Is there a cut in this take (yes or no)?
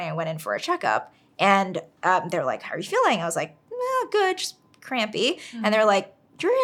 no